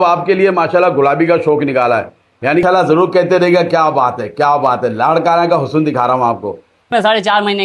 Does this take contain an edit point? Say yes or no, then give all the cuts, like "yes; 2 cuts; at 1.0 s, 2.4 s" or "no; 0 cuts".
yes; 2 cuts; at 2.6 s, 6.9 s